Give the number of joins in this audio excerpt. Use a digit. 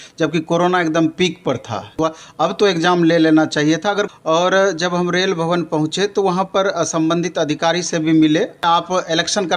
3